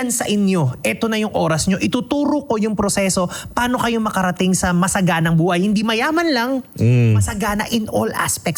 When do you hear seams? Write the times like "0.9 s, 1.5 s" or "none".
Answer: none